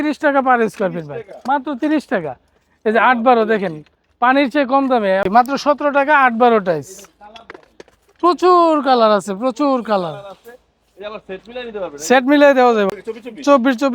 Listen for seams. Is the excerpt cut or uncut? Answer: cut